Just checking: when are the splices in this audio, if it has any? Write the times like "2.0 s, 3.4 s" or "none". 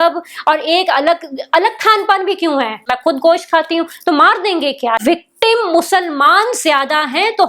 2.9 s, 5.0 s

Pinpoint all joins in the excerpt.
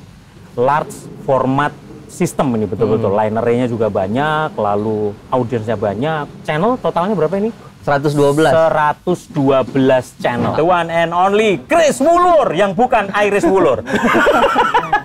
6.3 s, 10.5 s

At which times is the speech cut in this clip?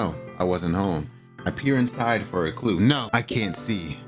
3.1 s

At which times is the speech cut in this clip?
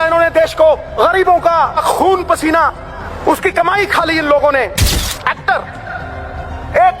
0.9 s, 1.8 s, 3.1 s, 5.0 s

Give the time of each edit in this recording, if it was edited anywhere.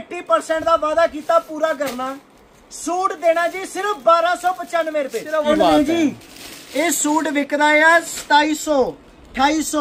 5.5 s

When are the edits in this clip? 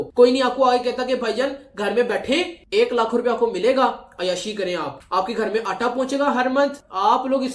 none

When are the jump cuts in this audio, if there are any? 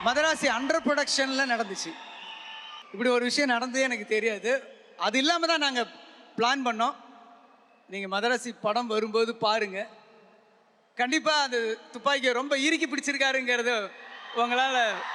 none

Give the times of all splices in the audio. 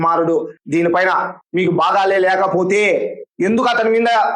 none

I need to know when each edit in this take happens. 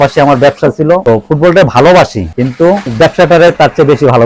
none

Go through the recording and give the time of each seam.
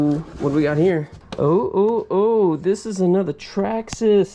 1.2 s

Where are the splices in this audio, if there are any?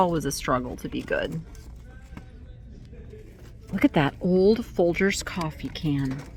none

